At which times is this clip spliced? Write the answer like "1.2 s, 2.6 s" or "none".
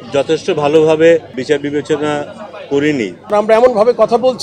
1.3 s, 3.3 s